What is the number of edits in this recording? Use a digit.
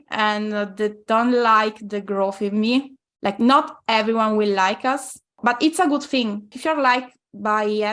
3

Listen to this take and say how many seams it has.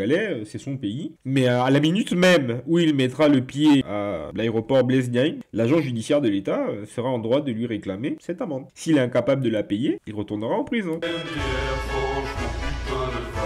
0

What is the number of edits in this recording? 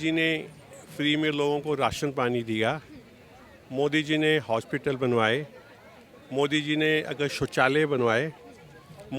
0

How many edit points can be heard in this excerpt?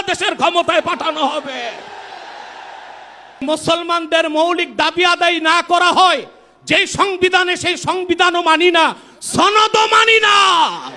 1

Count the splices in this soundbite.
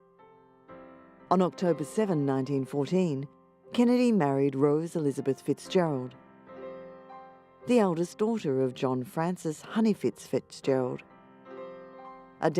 1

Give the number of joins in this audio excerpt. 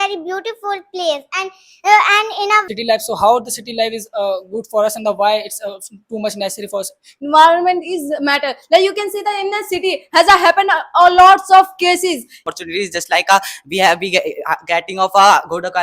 3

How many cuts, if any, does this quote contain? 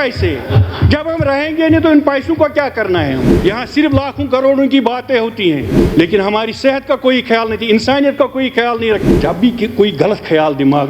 3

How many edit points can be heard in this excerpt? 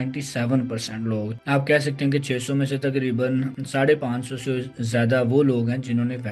0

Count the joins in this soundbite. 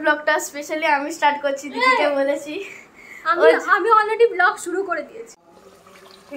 1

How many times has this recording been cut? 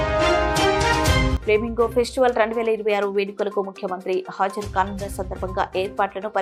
0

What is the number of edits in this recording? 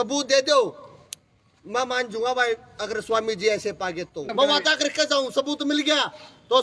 1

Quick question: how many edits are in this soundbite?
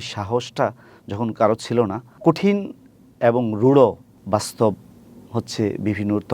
2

